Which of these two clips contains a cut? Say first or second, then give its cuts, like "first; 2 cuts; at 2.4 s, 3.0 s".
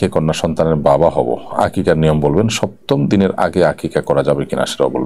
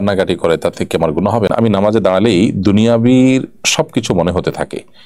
second; 1 cut; at 1.5 s